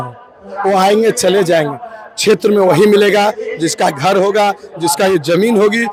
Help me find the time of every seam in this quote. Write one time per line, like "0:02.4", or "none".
none